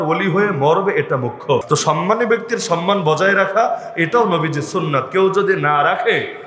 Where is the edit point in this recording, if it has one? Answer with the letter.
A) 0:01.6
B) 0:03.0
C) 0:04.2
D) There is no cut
A